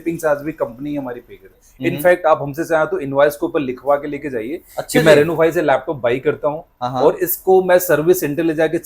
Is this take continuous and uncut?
no; 1 cut; at 1.6 s

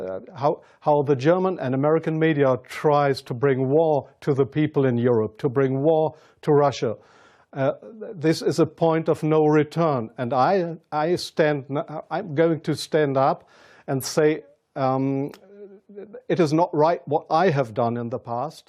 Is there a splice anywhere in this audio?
no; 0 cuts

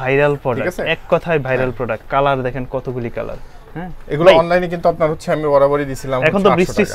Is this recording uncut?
yes; 0 cuts

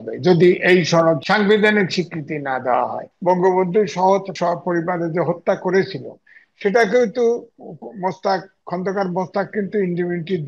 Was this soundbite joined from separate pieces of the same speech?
yes; 3 cuts; at 1.2 s, 3.1 s, 4.3 s

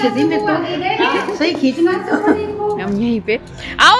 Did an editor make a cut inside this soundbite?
yes; 1 cut; at 2.7 s

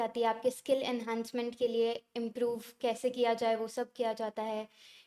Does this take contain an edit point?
no; 0 cuts

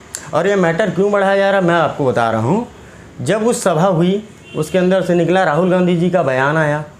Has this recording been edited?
no; 0 cuts

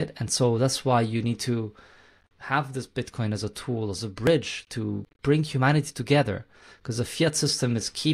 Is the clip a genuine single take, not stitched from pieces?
no; 1 cut; at 5.1 s

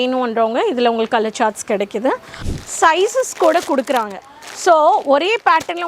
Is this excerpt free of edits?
no; 1 cut; at 2.3 s

